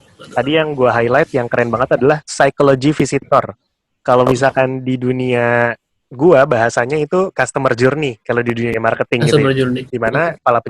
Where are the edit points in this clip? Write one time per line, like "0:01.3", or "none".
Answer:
0:02.3
0:09.9